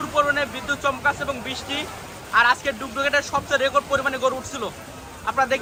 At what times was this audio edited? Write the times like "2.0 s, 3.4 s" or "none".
none